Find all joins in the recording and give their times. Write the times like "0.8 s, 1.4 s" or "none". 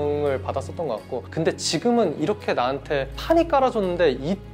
none